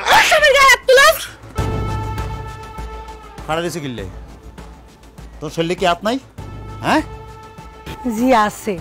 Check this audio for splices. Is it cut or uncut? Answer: uncut